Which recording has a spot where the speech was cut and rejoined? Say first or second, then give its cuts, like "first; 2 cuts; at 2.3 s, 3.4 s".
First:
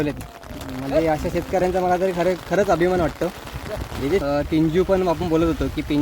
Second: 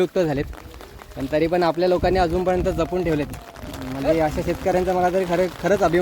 first; 1 cut; at 4.2 s